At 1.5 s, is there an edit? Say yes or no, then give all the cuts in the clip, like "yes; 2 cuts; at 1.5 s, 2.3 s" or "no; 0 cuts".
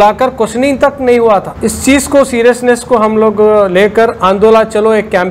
yes; 1 cut; at 1.5 s